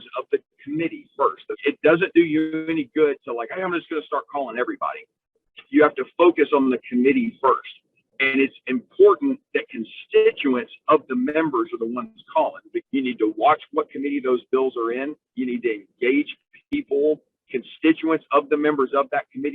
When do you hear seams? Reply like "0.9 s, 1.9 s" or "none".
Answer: 1.5 s, 12.8 s

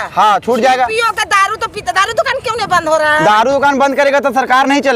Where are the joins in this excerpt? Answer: none

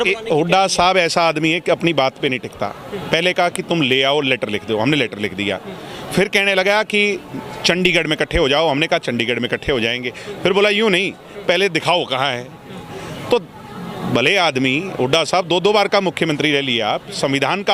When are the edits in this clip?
none

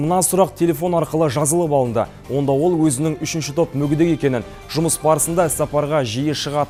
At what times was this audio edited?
none

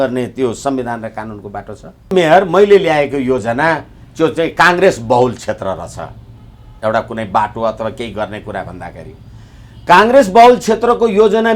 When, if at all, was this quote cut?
2.1 s

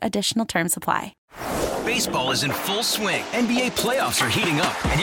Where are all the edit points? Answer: 1.1 s

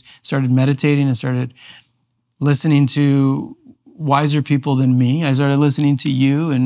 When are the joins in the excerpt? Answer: none

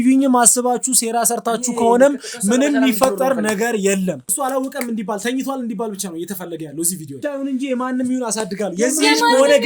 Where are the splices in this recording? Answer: 4.3 s, 7.3 s

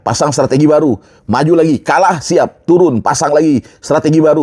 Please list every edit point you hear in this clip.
none

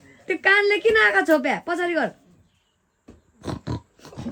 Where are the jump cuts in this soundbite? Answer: none

